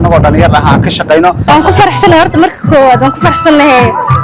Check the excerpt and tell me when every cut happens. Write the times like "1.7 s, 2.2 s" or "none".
1.4 s